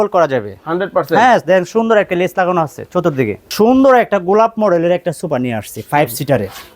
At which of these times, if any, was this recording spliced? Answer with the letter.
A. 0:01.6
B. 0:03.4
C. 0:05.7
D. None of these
B